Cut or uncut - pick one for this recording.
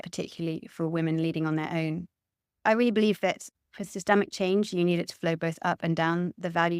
cut